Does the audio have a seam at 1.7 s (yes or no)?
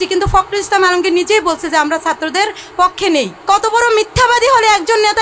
no